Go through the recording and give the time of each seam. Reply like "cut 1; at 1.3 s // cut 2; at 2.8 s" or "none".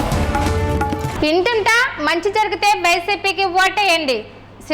none